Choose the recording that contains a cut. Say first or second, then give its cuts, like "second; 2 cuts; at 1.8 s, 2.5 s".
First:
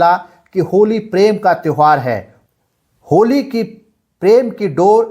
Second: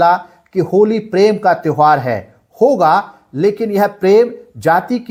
first; 1 cut; at 2.4 s